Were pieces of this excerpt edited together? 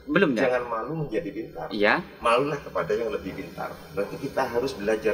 no; 0 cuts

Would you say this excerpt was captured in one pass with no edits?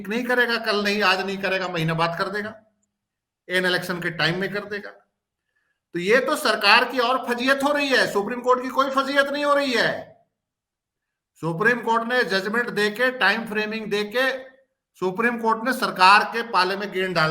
yes; 0 cuts

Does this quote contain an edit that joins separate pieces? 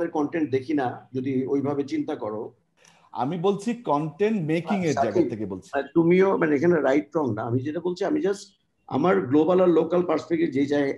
no; 0 cuts

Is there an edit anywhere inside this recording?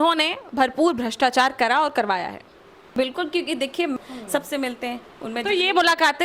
yes; 2 cuts; at 2.9 s, 4.0 s

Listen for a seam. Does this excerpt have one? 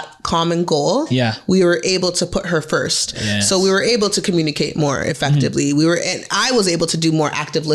no; 0 cuts

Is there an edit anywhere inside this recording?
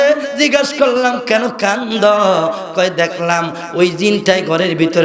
no; 0 cuts

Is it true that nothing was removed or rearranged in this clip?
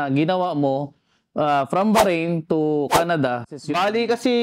no; 1 cut; at 3.5 s

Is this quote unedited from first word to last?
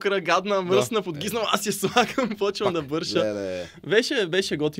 yes; 0 cuts

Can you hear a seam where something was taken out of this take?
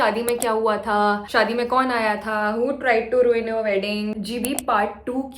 yes; 1 cut; at 4.1 s

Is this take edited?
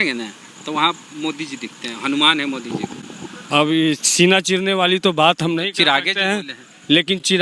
no; 0 cuts

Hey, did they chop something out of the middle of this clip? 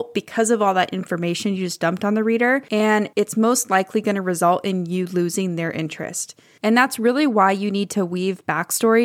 yes; 1 cut; at 2.9 s

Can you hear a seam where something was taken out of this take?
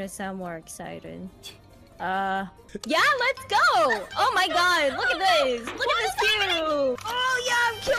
yes; 2 cuts; at 2.6 s, 7.0 s

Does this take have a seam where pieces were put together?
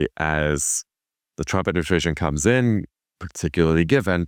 no; 0 cuts

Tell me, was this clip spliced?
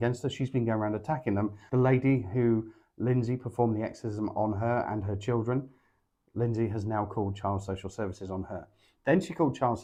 no; 0 cuts

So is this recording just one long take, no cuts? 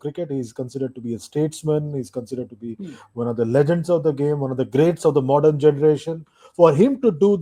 yes; 0 cuts

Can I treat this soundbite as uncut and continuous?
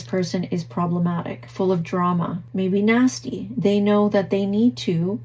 no; 2 cuts; at 1.4 s, 2.4 s

